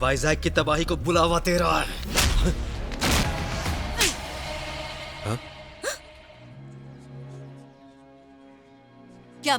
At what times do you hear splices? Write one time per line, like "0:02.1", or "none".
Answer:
0:03.2
0:06.4
0:07.6